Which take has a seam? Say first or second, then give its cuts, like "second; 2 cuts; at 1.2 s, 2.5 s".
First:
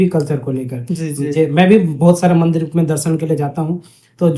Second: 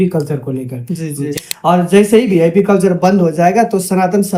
second; 1 cut; at 1.3 s